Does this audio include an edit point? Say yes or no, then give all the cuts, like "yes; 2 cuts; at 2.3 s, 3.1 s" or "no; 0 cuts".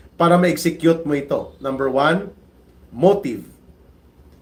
no; 0 cuts